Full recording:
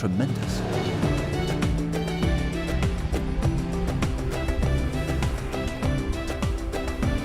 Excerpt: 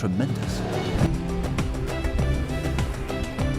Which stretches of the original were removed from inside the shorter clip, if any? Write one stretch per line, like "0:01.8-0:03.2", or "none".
0:01.1-0:03.5